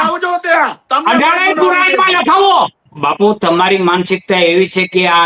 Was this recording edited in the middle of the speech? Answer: yes; 1 cut; at 2.9 s

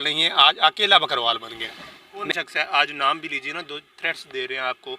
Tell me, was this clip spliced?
yes; 1 cut; at 2.2 s

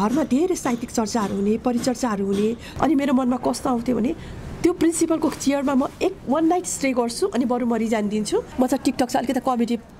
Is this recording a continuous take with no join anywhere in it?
no; 2 cuts; at 2.7 s, 8.5 s

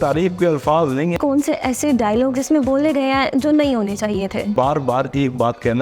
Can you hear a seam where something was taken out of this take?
yes; 2 cuts; at 1.2 s, 4.5 s

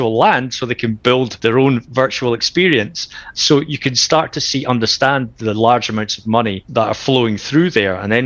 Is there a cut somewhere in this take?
yes; 3 cuts; at 1.3 s, 3.3 s, 6.6 s

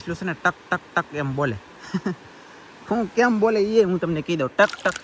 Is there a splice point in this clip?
no; 0 cuts

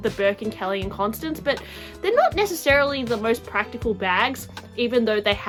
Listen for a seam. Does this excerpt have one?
no; 0 cuts

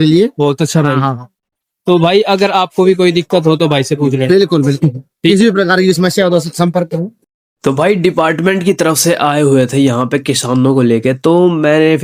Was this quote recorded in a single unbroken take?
yes; 0 cuts

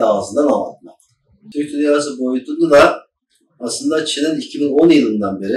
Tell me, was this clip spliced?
yes; 1 cut; at 1.4 s

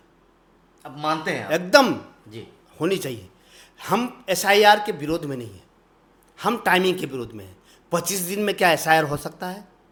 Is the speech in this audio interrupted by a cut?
no; 0 cuts

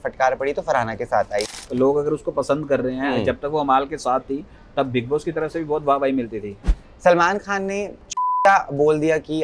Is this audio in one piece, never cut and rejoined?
no; 3 cuts; at 1.6 s, 6.8 s, 8.0 s

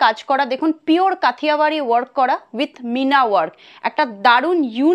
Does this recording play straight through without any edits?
yes; 0 cuts

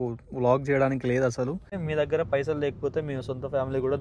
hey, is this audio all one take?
no; 1 cut; at 1.7 s

